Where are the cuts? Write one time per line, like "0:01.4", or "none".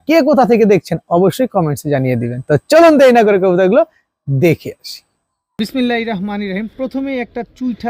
none